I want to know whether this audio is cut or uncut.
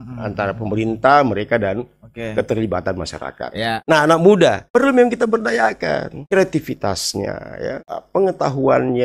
cut